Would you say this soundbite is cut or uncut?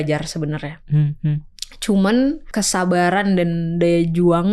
cut